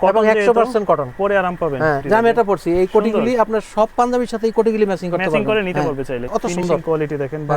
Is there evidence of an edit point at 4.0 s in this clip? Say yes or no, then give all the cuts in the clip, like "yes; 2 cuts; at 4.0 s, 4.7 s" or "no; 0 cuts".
no; 2 cuts; at 2.0 s, 6.3 s